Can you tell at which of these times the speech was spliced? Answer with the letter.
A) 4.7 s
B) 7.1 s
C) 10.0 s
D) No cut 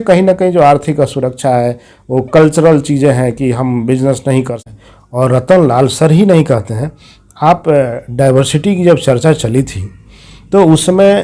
A